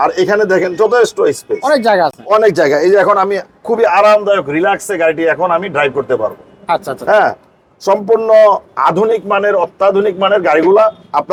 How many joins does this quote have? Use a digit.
0